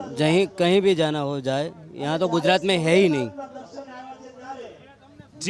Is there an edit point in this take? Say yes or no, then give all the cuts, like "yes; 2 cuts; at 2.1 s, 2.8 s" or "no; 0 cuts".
no; 0 cuts